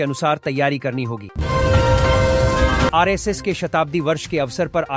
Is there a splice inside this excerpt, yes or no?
yes